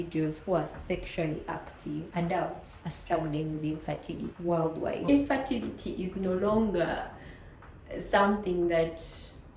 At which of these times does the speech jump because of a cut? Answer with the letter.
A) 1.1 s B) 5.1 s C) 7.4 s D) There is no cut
B